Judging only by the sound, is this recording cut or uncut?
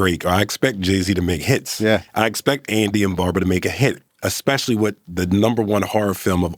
uncut